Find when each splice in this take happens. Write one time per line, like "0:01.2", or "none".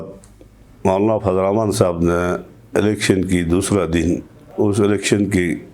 0:04.4